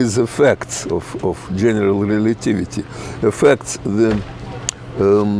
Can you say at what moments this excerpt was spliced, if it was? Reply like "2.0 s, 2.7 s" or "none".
none